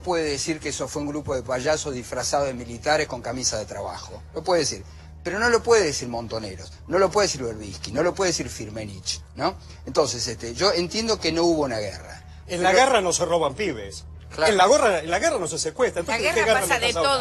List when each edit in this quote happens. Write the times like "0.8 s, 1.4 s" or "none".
15.4 s